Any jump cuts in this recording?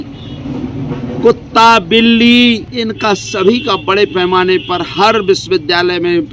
yes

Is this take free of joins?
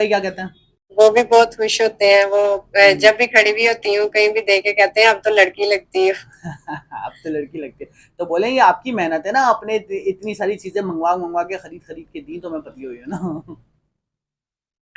yes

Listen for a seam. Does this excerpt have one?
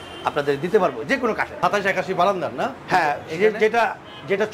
yes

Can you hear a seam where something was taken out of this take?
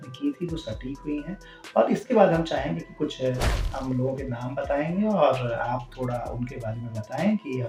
no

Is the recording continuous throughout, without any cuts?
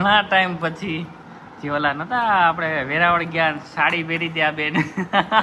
yes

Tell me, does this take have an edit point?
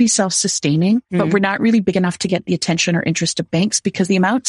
no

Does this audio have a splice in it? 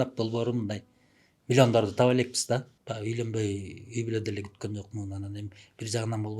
yes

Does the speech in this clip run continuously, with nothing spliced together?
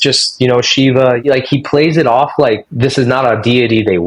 no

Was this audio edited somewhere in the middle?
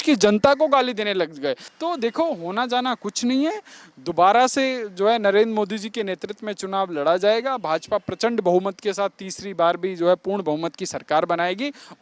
yes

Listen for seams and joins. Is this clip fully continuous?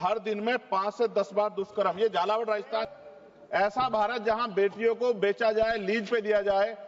no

